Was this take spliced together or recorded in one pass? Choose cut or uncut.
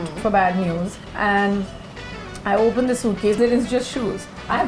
cut